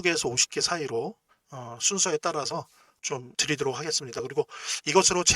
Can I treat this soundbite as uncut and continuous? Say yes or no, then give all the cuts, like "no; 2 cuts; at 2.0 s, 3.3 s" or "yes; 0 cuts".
yes; 0 cuts